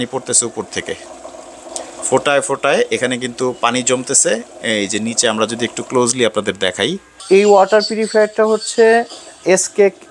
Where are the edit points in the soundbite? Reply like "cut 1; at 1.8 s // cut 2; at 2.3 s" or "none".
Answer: cut 1; at 7.2 s